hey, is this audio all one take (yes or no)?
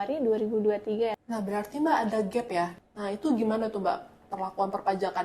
no